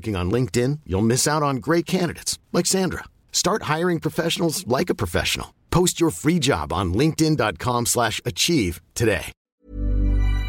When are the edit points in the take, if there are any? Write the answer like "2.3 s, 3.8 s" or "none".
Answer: 9.4 s